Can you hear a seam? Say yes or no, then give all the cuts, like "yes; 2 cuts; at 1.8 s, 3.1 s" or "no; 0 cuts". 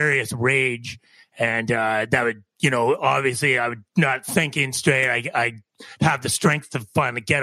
no; 0 cuts